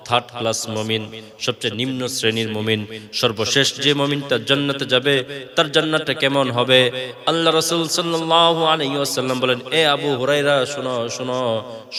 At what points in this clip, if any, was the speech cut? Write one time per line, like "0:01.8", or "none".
none